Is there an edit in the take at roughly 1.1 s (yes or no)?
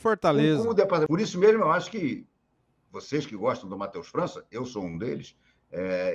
yes